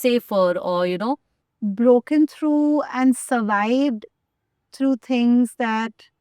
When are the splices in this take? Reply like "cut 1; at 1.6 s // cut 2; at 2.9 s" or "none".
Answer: cut 1; at 1.3 s